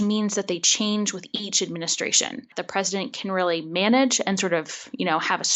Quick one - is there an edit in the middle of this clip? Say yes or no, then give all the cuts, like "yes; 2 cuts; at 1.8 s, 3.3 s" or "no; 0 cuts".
yes; 1 cut; at 2.6 s